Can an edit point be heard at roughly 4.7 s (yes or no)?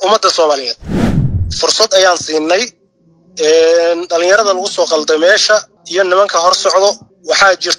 no